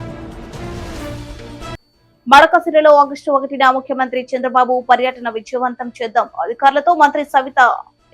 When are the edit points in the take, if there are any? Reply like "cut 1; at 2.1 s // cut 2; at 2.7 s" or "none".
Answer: cut 1; at 1.6 s